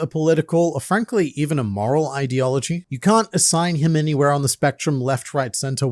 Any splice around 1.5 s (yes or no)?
no